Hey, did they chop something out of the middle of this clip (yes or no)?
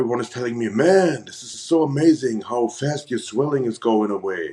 no